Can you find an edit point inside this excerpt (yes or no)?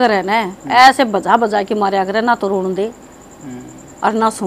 no